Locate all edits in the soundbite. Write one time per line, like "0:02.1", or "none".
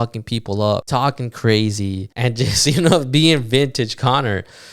0:00.9
0:02.1